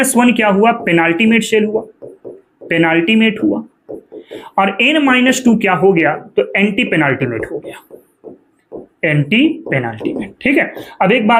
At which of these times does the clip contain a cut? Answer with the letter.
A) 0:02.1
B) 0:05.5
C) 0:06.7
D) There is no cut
D